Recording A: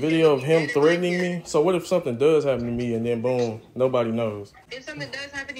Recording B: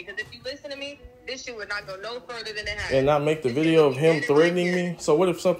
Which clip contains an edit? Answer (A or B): A